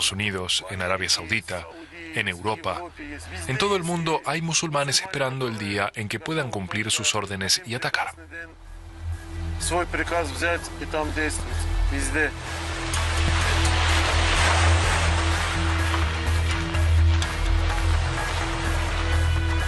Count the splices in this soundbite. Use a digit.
1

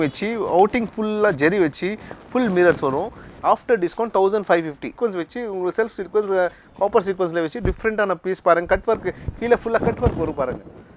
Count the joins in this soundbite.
1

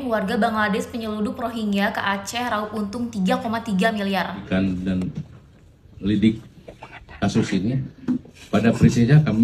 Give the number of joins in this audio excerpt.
1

